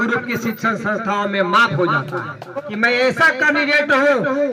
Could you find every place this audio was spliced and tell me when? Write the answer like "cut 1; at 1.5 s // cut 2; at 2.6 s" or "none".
cut 1; at 2.7 s